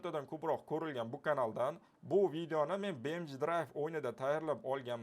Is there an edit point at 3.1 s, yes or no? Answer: no